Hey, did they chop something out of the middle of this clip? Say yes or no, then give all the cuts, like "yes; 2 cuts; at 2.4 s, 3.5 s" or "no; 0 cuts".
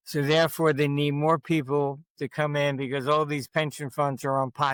no; 0 cuts